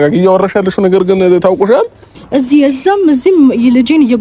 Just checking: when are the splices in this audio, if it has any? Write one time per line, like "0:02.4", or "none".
0:02.2